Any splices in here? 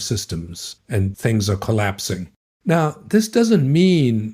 yes; 2 cuts; at 1.1 s, 2.3 s

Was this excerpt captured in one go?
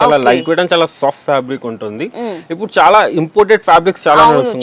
yes; 0 cuts

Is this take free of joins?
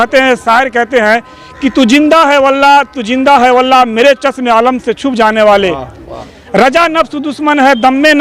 yes; 0 cuts

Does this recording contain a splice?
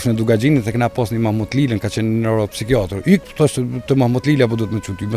no; 0 cuts

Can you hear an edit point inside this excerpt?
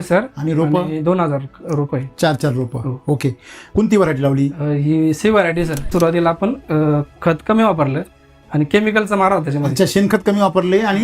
yes; 2 cuts; at 3.6 s, 5.9 s

